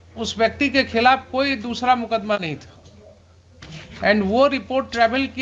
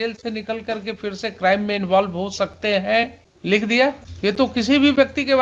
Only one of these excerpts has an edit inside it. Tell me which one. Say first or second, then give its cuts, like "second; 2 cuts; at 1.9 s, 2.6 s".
second; 2 cuts; at 3.3 s, 4.1 s